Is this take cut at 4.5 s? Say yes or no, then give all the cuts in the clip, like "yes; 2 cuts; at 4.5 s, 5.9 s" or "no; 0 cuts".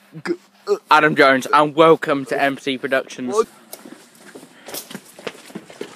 no; 0 cuts